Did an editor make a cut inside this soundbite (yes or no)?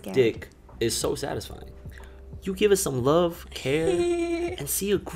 no